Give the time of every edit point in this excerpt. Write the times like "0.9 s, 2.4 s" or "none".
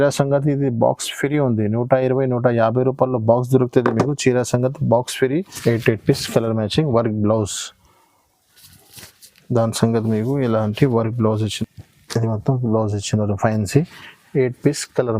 5.5 s, 11.5 s